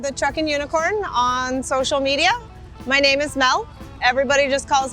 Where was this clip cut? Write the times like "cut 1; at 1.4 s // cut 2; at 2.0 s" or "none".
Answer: none